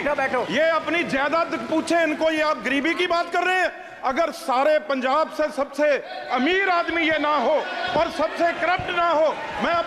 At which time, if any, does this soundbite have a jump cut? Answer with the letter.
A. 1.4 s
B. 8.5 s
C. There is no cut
C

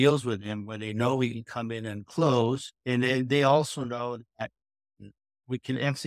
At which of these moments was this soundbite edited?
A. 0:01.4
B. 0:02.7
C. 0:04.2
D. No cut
B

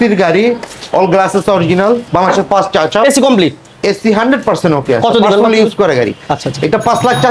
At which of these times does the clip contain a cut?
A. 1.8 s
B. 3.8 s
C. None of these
C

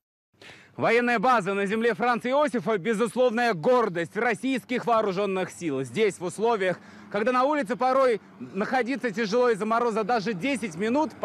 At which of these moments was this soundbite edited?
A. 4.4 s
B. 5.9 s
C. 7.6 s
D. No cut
B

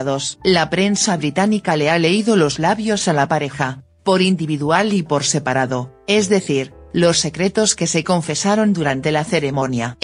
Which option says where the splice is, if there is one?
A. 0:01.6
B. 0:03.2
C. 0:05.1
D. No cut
C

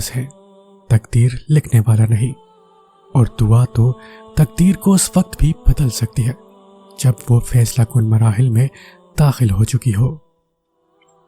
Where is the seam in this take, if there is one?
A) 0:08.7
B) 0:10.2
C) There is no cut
B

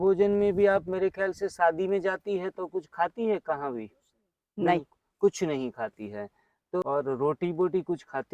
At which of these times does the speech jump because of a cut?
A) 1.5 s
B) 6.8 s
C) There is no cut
B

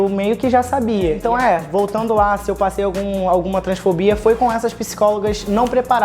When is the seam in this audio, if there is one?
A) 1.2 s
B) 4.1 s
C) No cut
A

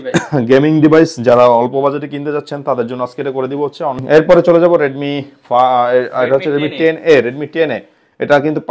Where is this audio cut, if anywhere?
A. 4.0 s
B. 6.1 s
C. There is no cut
A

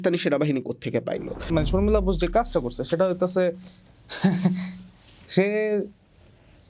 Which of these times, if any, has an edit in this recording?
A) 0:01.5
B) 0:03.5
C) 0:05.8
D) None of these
A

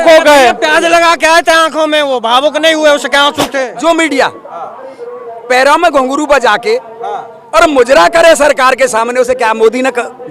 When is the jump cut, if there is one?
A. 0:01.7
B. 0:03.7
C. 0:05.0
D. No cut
B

